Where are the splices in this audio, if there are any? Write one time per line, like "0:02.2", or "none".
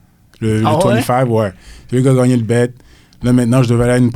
none

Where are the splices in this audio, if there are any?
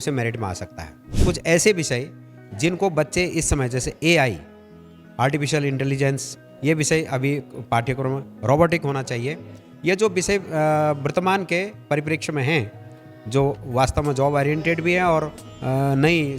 0:01.1

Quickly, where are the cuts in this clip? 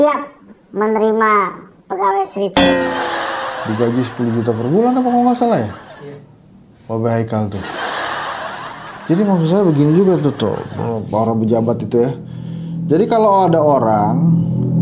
none

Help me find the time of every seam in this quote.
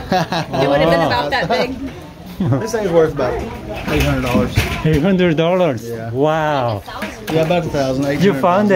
0:02.2

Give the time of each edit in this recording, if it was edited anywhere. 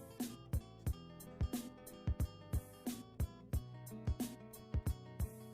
none

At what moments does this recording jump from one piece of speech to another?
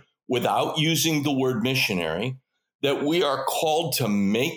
none

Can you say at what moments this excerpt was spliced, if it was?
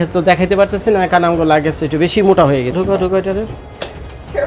0:02.7

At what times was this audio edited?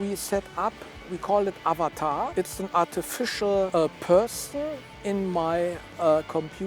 0:01.1
0:02.3
0:03.7

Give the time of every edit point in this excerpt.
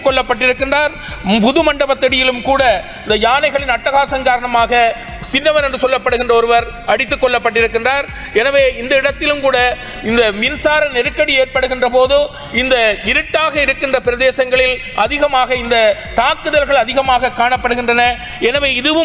none

